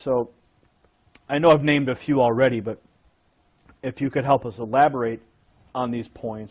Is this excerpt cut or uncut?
uncut